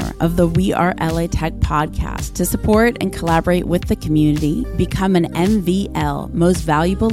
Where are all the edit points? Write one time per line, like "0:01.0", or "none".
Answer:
none